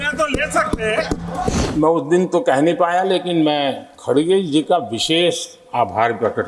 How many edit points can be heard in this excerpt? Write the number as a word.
one